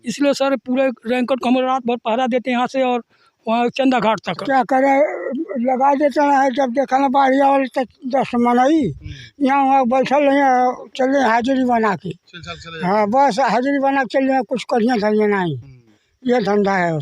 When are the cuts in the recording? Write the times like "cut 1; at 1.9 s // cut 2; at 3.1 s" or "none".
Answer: cut 1; at 4.4 s

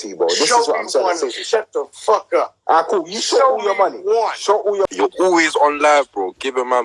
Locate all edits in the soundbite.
cut 1; at 4.9 s

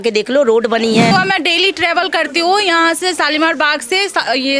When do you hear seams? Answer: cut 1; at 1.1 s

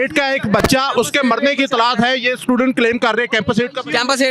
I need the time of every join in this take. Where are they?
none

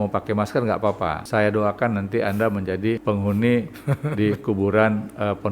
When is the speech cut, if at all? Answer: cut 1; at 1.2 s // cut 2; at 3.0 s

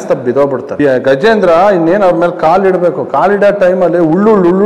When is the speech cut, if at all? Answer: none

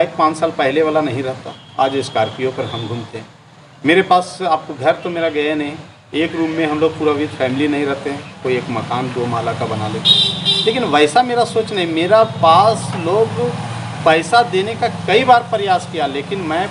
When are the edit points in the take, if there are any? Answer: none

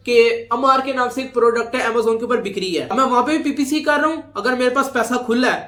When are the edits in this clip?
none

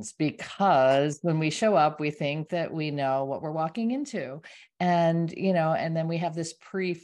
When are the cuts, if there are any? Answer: none

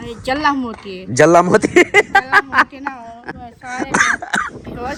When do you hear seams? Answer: none

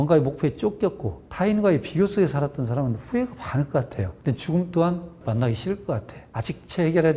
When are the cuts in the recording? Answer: none

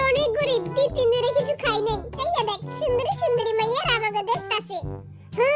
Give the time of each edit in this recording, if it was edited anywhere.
cut 1; at 2.2 s

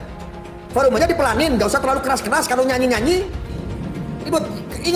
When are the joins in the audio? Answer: cut 1; at 3.6 s

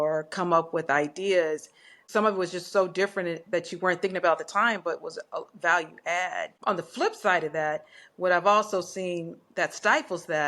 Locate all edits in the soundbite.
cut 1; at 2.0 s // cut 2; at 6.5 s

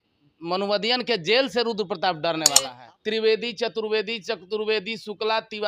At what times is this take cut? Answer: cut 1; at 2.7 s

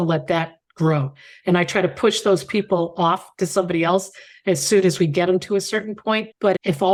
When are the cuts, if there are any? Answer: none

